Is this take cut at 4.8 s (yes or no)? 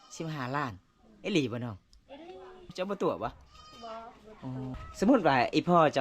yes